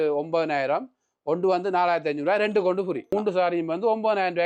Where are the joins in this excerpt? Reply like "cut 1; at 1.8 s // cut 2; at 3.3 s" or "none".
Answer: cut 1; at 3.1 s